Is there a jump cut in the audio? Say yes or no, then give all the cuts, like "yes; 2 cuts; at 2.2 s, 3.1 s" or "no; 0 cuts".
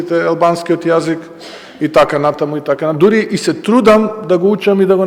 no; 0 cuts